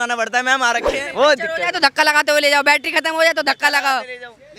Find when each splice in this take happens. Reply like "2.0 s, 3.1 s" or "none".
0.9 s